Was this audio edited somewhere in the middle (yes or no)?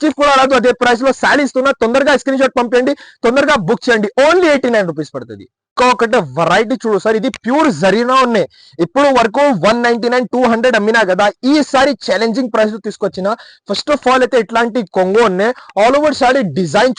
no